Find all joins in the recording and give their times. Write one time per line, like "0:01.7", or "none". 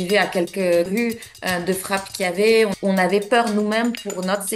0:02.8